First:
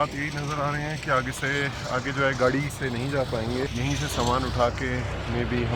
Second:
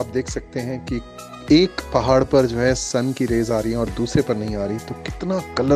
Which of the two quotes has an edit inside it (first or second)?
first